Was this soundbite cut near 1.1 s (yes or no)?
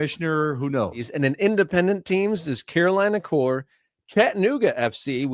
yes